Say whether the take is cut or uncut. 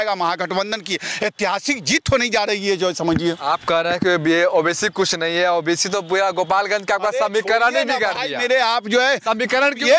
uncut